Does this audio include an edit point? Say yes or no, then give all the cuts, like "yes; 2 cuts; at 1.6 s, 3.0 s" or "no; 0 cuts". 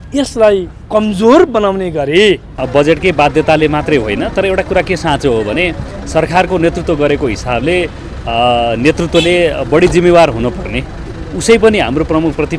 yes; 1 cut; at 2.5 s